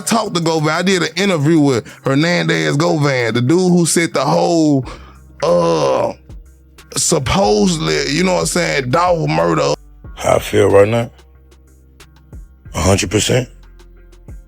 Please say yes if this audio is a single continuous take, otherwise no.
no